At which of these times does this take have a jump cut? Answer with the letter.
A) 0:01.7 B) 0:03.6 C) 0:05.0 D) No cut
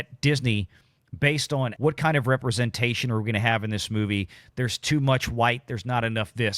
A